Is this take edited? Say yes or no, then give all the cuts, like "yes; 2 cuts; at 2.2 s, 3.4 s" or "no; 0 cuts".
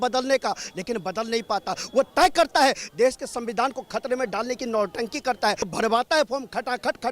yes; 1 cut; at 5.7 s